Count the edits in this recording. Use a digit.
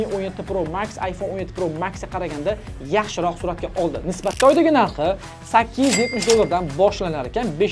1